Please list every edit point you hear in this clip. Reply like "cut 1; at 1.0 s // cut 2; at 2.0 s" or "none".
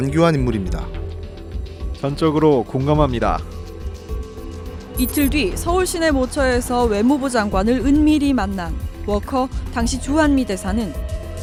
none